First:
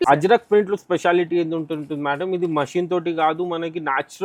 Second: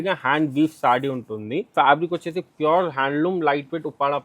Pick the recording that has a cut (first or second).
second